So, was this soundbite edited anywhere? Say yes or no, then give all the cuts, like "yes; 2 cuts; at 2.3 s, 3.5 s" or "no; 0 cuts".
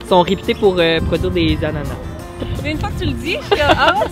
yes; 1 cut; at 2.7 s